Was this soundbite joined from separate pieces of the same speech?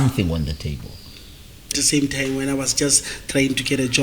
yes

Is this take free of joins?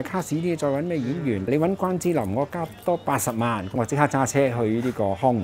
no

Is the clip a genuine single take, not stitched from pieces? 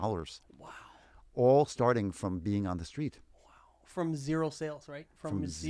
yes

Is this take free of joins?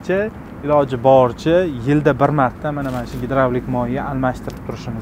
yes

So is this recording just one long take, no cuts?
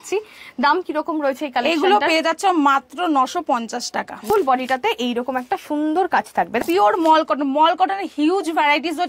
no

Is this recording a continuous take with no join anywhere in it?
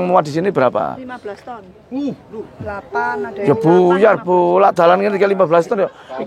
yes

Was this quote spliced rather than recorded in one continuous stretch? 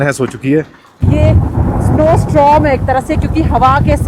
yes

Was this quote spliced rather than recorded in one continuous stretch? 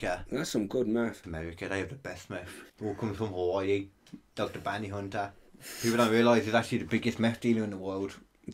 yes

